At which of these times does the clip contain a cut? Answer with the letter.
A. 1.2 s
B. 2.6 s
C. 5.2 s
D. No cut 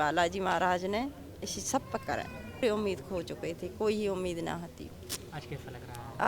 B